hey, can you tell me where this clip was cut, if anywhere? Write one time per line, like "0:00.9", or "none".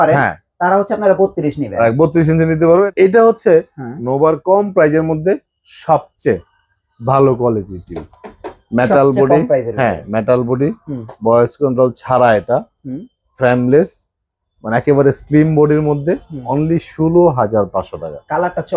0:02.9